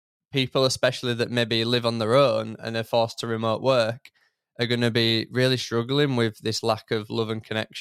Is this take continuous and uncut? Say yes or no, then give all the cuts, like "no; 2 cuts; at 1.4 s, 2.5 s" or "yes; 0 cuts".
yes; 0 cuts